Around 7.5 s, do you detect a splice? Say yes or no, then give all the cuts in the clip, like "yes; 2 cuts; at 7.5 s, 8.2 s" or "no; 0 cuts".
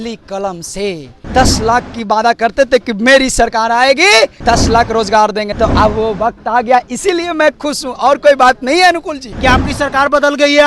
no; 4 cuts; at 1.1 s, 4.4 s, 5.5 s, 9.2 s